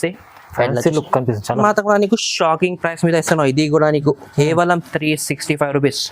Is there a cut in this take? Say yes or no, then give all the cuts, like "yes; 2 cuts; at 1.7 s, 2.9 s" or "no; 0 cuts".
yes; 1 cut; at 1.6 s